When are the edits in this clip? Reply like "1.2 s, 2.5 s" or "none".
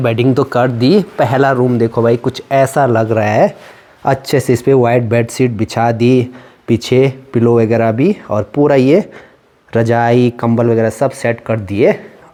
none